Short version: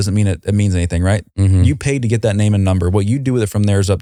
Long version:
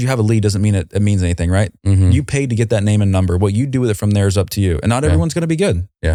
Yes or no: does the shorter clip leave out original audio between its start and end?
no